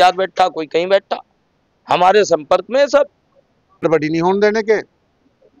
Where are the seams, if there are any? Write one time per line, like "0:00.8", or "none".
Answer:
0:03.8